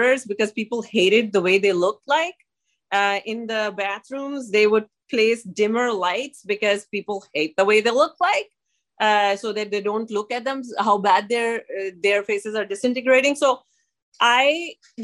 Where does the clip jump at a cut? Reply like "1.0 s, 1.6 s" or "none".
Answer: none